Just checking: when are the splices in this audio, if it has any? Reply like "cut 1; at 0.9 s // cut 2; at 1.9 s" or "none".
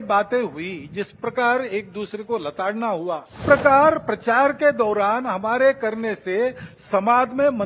cut 1; at 3.4 s

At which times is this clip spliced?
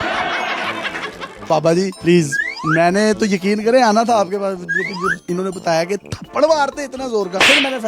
cut 1; at 1.4 s

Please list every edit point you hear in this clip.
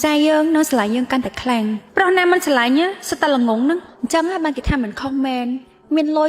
cut 1; at 3.9 s

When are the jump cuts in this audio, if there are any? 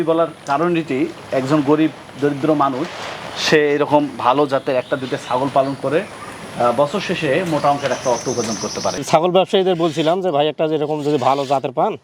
cut 1; at 9.0 s

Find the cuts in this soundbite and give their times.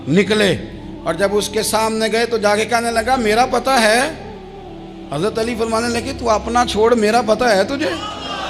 none

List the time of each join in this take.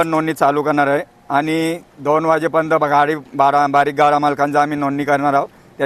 none

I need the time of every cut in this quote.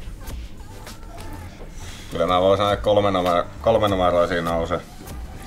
cut 1; at 1.5 s

